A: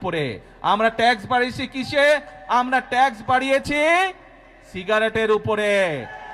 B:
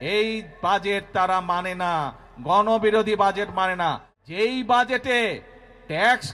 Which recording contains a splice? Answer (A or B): B